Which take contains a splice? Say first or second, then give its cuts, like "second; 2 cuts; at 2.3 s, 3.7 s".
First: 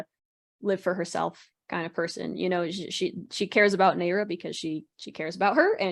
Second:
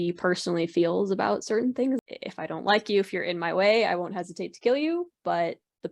second; 1 cut; at 2.0 s